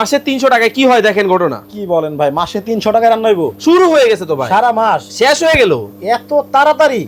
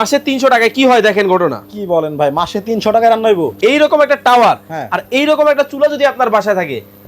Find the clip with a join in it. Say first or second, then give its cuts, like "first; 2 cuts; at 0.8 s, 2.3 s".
second; 1 cut; at 3.5 s